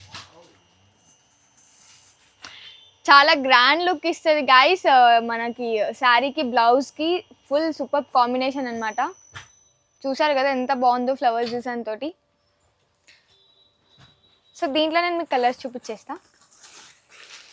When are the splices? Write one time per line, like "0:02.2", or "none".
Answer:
none